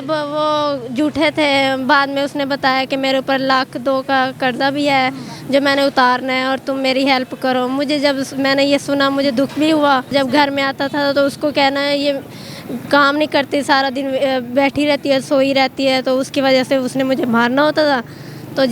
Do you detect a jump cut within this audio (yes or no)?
yes